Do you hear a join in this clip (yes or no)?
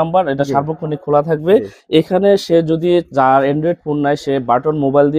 no